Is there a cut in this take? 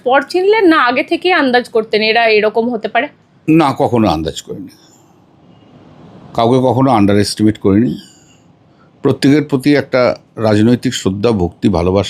no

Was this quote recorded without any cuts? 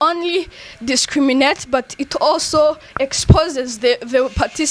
yes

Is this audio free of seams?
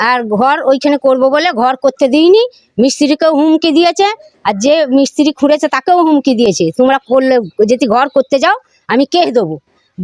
yes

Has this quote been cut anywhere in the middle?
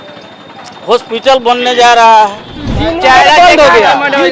yes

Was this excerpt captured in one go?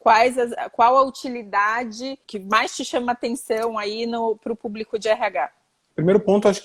yes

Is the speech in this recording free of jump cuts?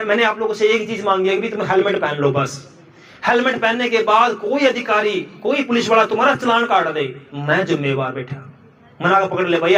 yes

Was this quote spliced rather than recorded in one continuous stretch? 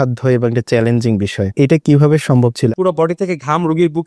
yes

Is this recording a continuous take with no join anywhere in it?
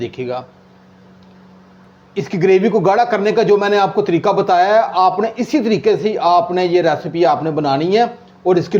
yes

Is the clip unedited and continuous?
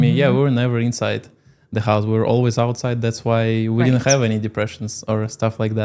yes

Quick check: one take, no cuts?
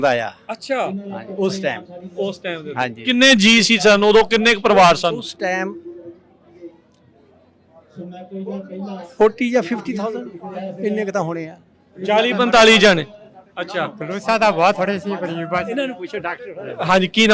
yes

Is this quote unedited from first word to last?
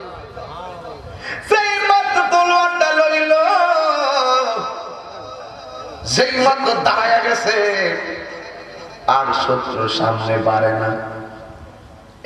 yes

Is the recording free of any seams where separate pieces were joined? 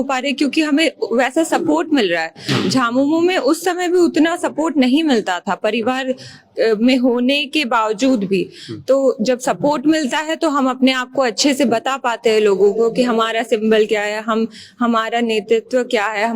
yes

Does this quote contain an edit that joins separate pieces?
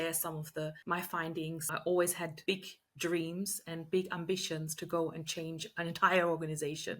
yes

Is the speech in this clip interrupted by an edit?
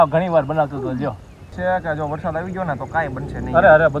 yes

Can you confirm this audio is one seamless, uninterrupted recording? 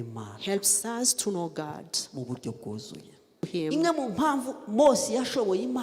no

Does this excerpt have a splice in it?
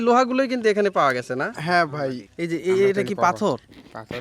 yes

